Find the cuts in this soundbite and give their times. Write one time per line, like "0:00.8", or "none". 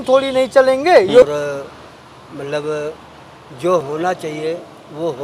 0:01.2